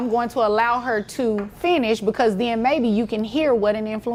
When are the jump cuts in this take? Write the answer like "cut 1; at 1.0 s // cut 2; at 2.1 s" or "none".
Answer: none